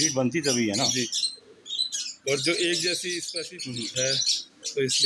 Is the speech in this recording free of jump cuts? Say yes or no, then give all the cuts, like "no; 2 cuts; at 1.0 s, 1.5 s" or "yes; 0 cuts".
no; 1 cut; at 3.2 s